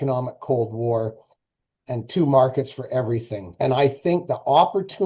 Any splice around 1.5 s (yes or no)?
no